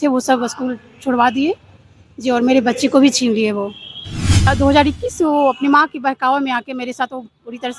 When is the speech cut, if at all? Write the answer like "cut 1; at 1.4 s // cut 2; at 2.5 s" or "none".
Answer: cut 1; at 4.5 s